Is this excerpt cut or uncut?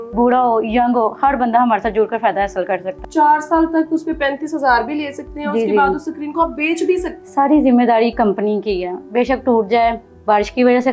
cut